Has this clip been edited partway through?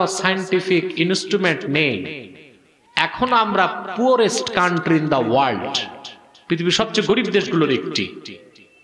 no; 0 cuts

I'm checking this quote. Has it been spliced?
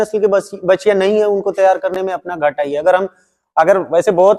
no; 0 cuts

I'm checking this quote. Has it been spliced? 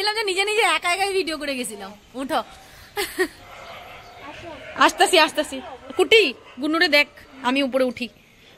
no; 0 cuts

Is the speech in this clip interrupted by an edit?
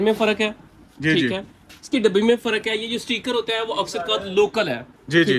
no; 0 cuts

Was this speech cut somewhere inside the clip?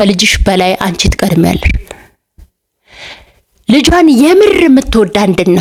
no; 0 cuts

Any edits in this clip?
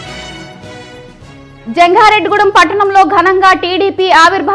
no; 0 cuts

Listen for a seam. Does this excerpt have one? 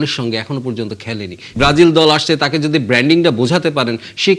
yes; 1 cut; at 1.5 s

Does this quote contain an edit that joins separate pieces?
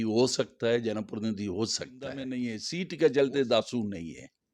yes; 1 cut; at 2.3 s

